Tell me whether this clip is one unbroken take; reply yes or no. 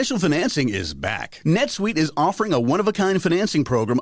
yes